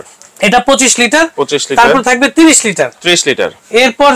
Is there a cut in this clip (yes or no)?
no